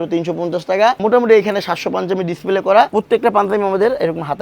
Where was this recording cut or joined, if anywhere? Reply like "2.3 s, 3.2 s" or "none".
1.0 s, 2.9 s